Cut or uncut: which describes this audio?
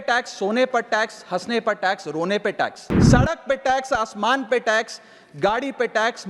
cut